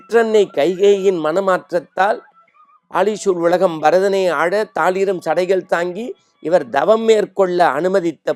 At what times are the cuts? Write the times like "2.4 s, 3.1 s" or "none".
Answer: none